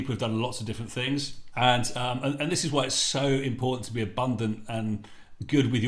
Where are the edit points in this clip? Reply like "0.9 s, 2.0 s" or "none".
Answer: 1.4 s